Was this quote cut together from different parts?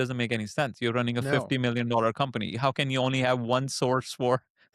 no; 0 cuts

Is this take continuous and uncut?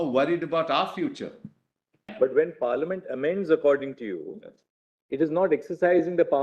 no; 1 cut; at 2.1 s

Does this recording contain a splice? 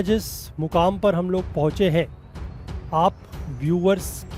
no; 0 cuts

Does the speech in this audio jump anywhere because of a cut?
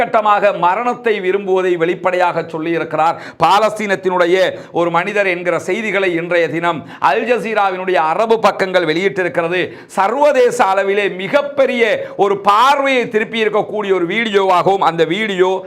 no; 0 cuts

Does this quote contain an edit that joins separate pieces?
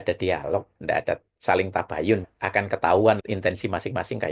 yes; 3 cuts; at 0.8 s, 2.3 s, 3.2 s

